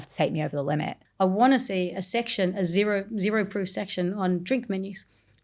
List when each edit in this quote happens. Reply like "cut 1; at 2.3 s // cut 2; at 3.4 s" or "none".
cut 1; at 1.0 s